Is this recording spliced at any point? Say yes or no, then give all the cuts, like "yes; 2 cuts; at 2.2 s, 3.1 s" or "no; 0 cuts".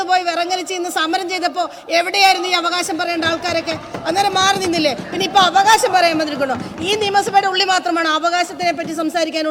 no; 0 cuts